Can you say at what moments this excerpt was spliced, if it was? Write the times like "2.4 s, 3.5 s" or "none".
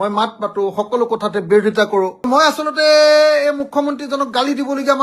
2.3 s